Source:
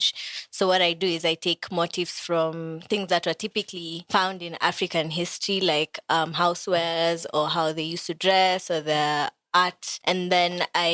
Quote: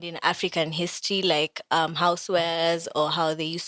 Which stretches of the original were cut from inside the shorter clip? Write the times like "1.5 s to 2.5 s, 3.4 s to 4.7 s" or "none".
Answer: none